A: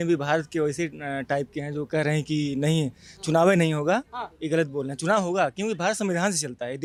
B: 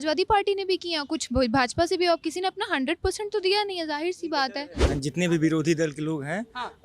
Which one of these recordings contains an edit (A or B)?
B